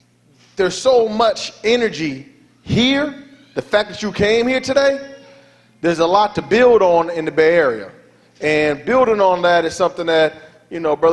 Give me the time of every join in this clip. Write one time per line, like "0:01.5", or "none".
none